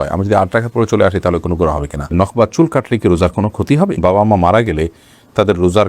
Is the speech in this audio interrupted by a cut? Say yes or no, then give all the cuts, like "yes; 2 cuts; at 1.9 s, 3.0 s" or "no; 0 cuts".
yes; 2 cuts; at 2.1 s, 4.0 s